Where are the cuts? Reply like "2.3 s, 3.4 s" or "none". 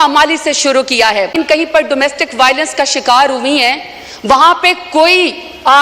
1.3 s